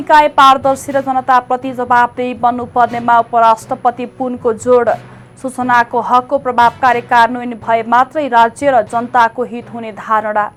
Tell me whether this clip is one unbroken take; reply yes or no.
yes